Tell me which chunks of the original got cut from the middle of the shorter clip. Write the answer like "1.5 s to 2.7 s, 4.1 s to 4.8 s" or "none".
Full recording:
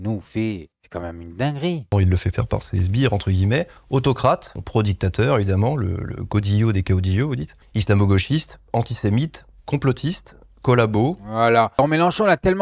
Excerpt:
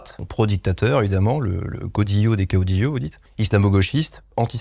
none